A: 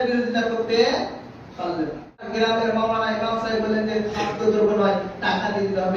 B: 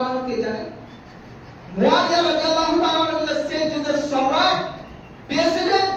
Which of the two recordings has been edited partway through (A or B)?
A